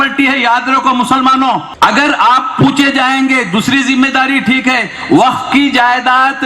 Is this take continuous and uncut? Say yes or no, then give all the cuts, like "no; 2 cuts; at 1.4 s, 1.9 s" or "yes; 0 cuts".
no; 1 cut; at 1.7 s